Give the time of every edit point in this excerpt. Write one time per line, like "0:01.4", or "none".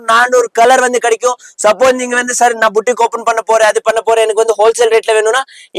none